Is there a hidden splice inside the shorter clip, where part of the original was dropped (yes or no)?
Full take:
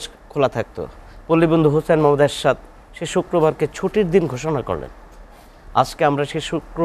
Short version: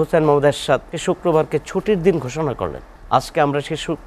yes